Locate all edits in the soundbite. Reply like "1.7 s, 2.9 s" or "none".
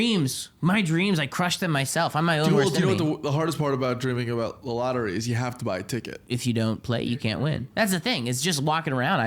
6.2 s, 7.7 s